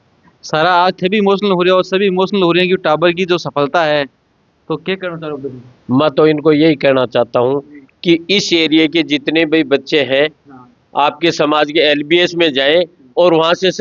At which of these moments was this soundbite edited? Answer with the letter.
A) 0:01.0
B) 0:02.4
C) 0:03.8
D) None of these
D